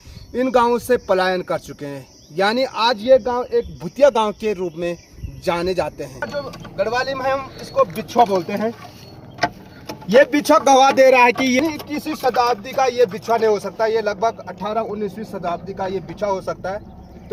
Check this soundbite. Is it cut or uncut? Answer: cut